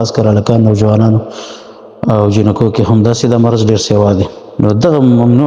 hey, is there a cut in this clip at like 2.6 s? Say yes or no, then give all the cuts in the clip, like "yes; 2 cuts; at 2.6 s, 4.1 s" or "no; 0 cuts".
no; 1 cut; at 4.4 s